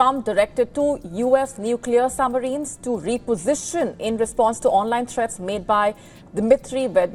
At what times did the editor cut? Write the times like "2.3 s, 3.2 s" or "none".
none